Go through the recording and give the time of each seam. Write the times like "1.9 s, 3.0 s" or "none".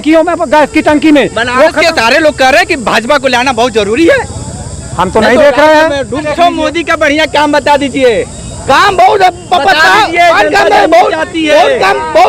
6.3 s